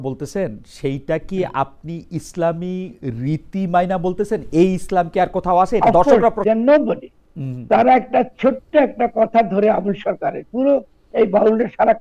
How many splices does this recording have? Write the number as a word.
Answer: one